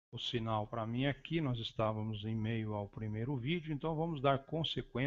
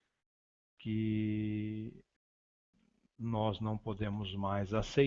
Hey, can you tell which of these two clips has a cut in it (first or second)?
second